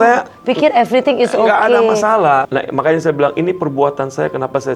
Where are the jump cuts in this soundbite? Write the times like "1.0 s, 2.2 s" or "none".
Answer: 2.4 s